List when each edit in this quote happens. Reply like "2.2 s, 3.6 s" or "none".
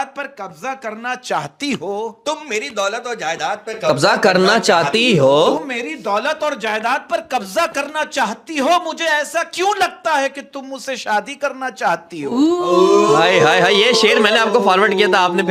none